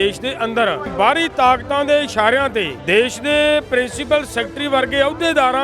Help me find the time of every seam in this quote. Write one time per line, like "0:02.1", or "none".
0:00.9
0:02.8